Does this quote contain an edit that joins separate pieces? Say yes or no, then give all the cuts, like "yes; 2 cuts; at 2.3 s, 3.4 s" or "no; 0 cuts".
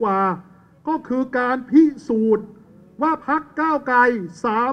no; 0 cuts